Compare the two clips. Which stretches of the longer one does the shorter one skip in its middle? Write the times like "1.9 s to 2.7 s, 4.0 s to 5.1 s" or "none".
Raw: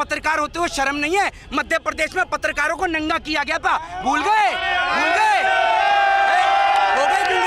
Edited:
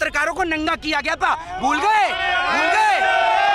none

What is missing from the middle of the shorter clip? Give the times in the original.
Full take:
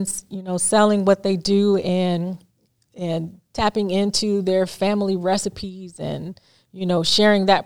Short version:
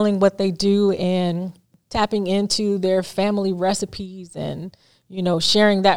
2.6 s to 3.4 s

